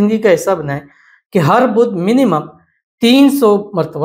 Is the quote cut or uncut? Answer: uncut